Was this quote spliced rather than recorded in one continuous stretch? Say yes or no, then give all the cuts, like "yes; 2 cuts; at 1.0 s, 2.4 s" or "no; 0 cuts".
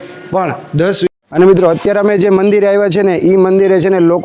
yes; 1 cut; at 1.1 s